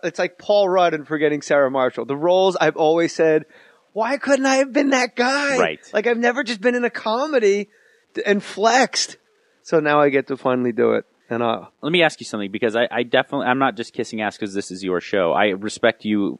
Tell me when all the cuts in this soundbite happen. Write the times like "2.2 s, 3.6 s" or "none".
6.9 s